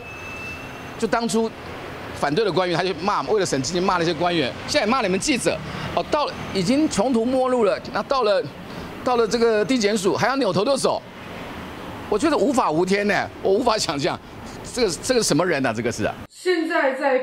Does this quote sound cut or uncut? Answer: cut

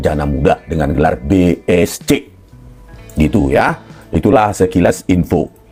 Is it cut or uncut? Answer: uncut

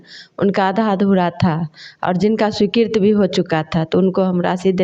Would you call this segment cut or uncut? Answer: uncut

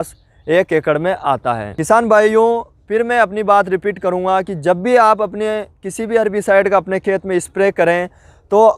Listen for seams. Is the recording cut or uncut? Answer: uncut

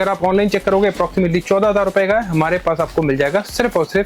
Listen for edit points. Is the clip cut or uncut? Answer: uncut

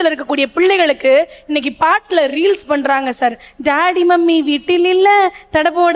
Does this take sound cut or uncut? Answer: uncut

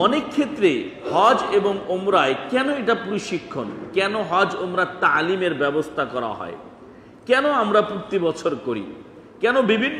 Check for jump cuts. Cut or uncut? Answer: uncut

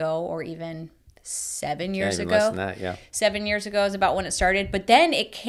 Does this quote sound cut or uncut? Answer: uncut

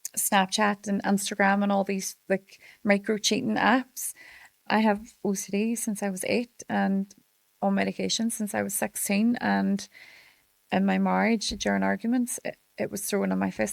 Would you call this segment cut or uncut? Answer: cut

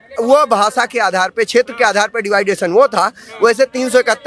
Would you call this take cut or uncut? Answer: uncut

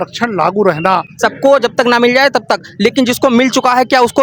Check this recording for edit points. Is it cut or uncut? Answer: cut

